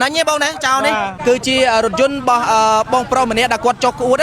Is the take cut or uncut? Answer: cut